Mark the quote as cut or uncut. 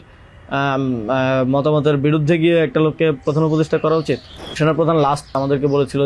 cut